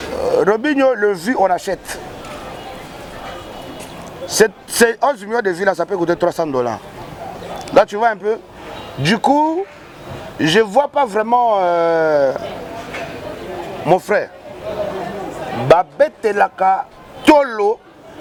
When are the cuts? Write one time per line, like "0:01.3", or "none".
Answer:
none